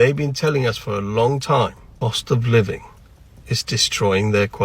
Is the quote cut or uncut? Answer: cut